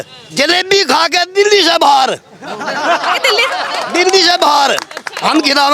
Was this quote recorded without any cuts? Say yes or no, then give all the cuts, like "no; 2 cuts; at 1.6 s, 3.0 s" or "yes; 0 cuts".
yes; 0 cuts